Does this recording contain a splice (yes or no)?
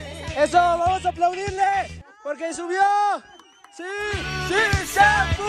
yes